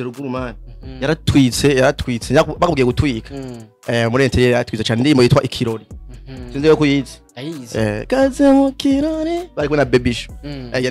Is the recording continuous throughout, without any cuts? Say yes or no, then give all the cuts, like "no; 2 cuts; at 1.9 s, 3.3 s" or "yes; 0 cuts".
yes; 0 cuts